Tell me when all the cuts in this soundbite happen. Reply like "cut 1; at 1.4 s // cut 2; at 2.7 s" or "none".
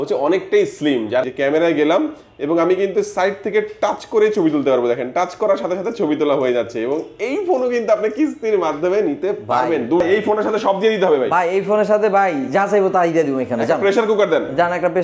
cut 1; at 1.3 s // cut 2; at 10.0 s